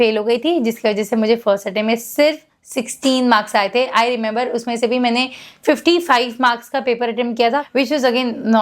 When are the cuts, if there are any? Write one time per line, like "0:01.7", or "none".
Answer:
0:07.6